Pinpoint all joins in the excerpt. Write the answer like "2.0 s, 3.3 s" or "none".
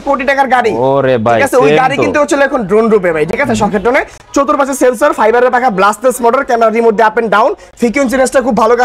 none